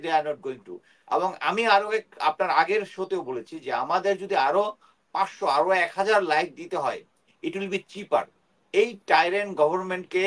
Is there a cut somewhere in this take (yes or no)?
no